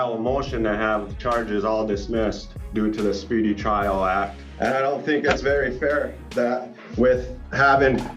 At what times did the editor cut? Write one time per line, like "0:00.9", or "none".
0:02.5
0:04.4